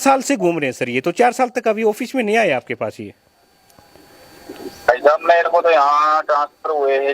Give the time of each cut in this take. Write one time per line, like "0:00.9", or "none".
none